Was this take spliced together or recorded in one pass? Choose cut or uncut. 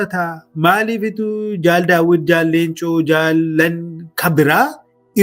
uncut